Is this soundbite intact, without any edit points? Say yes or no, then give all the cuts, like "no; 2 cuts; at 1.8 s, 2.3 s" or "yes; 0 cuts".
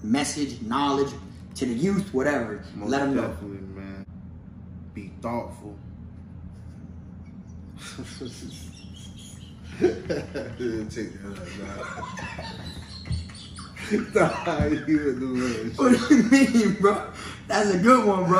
no; 1 cut; at 4.1 s